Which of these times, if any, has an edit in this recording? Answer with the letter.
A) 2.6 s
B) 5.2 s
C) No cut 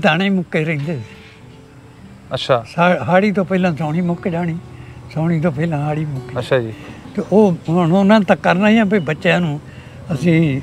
C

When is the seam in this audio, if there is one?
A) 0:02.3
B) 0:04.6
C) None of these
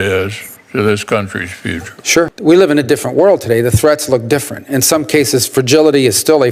A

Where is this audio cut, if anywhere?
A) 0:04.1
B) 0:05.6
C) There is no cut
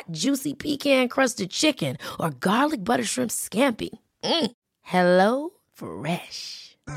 C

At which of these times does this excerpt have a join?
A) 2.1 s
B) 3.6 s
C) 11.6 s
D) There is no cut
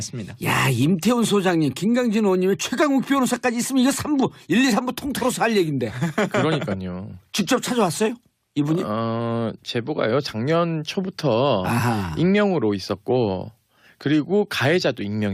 A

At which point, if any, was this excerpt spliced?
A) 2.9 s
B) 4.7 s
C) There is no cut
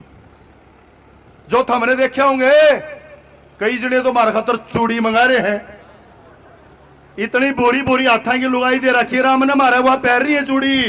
C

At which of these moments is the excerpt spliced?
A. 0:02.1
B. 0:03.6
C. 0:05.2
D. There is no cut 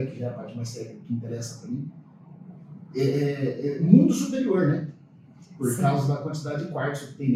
D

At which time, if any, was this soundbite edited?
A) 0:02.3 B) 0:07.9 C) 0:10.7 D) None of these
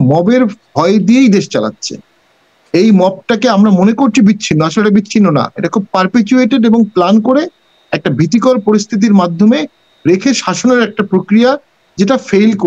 D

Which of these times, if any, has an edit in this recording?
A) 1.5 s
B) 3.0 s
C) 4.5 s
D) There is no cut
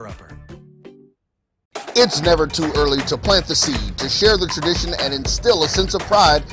C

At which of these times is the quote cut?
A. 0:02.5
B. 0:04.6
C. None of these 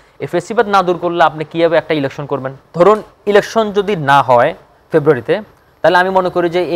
A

